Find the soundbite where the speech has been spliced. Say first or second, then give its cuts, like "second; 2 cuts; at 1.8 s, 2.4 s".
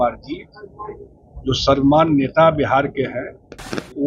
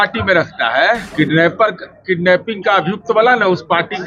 second; 1 cut; at 1.1 s